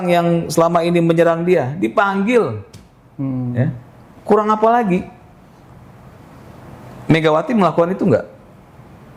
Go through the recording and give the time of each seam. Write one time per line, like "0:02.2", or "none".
none